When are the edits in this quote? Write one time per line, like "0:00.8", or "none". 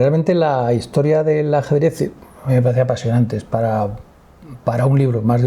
none